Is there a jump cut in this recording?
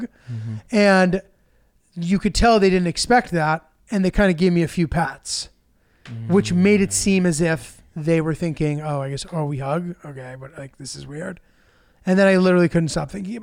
no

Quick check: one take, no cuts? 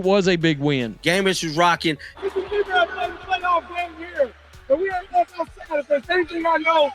no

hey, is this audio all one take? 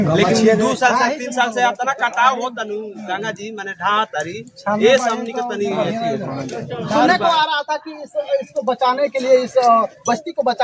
yes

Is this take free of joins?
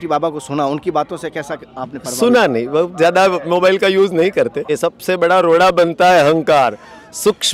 no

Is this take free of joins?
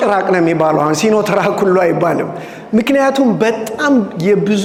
yes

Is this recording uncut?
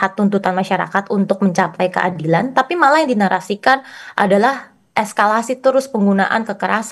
yes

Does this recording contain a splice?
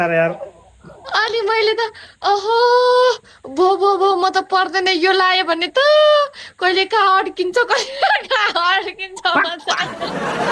no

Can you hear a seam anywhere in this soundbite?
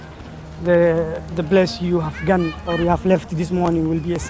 no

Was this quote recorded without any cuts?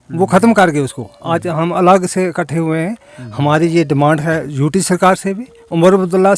yes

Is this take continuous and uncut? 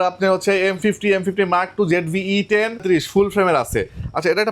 no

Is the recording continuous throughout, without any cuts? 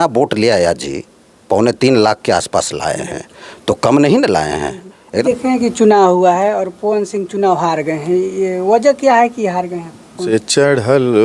no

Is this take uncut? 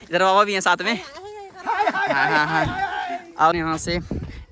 no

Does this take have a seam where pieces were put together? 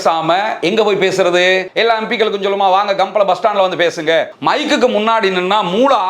yes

